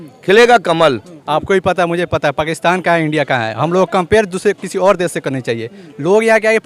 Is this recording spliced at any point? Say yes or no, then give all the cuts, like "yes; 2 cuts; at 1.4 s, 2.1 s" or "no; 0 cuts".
yes; 1 cut; at 1.1 s